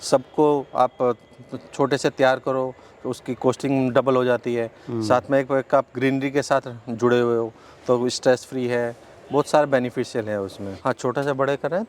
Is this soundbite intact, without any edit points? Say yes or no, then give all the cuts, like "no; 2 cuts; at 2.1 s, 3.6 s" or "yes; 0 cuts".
no; 1 cut; at 10.8 s